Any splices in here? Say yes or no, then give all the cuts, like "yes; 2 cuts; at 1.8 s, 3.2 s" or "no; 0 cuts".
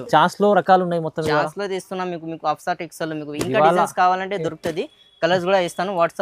no; 0 cuts